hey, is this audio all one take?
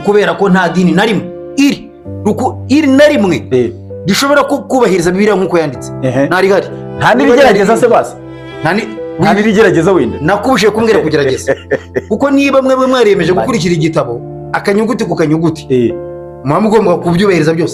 yes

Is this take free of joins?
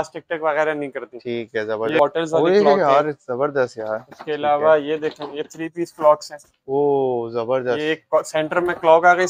no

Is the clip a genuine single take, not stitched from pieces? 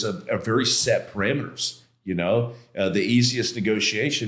yes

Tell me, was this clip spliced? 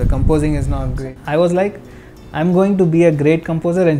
yes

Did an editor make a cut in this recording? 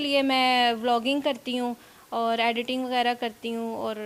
no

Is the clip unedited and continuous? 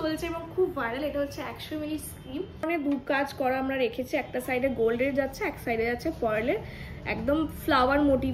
no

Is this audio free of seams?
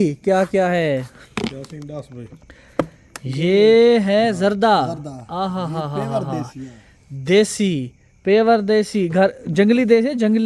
yes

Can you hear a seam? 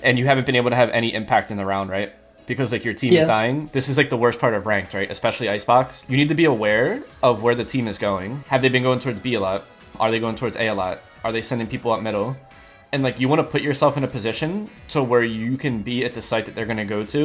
yes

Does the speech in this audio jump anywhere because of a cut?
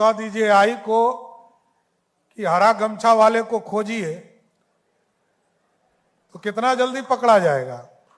no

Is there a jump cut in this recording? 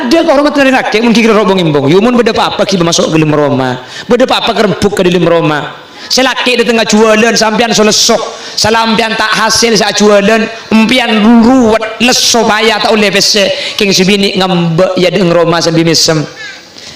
no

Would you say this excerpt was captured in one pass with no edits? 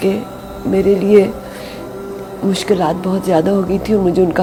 yes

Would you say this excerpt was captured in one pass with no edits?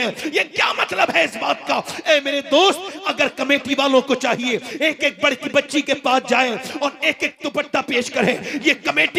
yes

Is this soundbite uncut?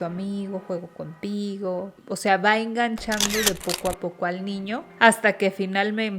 no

